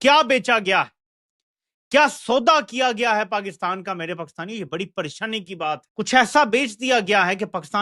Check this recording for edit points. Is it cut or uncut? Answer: cut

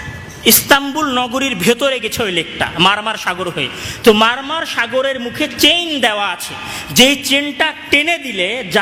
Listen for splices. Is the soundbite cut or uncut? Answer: uncut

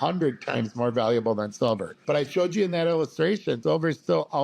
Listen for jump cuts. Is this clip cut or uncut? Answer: cut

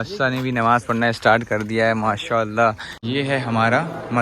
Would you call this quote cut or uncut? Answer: cut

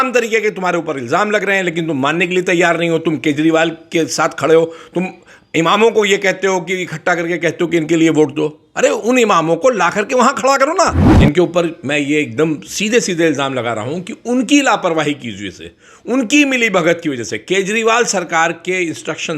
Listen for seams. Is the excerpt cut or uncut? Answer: cut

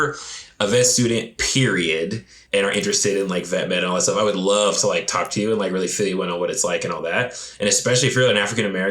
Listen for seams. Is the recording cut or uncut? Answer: cut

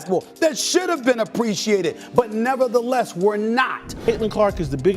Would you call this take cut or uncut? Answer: cut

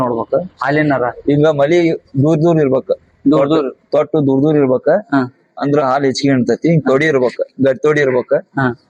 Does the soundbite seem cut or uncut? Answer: uncut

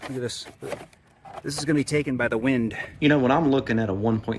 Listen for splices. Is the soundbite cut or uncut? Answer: cut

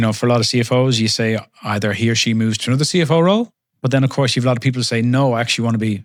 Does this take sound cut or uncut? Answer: uncut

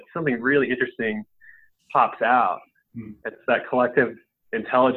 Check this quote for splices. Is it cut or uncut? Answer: uncut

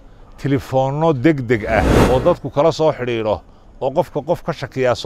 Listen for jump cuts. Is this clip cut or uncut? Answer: cut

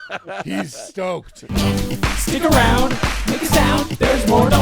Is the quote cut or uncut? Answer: cut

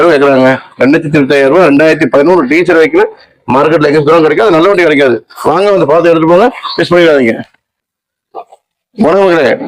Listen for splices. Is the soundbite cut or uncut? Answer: uncut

